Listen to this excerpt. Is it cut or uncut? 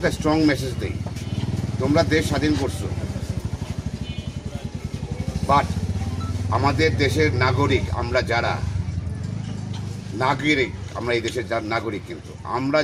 uncut